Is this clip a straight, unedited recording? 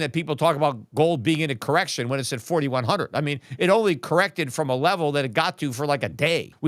yes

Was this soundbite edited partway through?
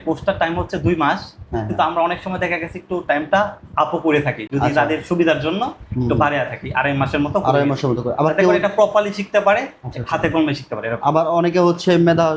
no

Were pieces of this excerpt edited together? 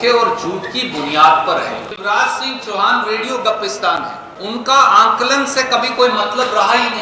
yes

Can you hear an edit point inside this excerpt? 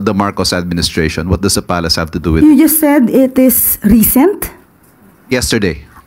no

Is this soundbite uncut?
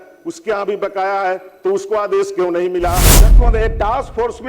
no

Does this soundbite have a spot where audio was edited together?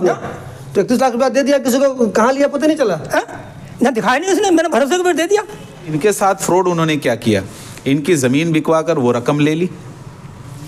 yes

